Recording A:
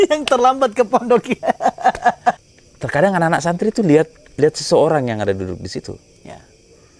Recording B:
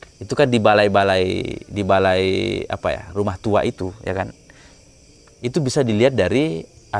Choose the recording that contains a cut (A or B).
A